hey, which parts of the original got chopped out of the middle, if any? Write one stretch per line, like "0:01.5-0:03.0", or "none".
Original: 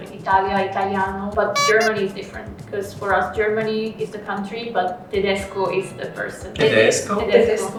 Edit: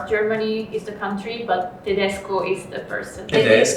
none